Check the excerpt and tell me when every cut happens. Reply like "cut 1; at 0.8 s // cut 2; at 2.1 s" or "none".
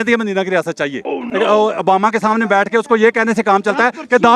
cut 1; at 1.2 s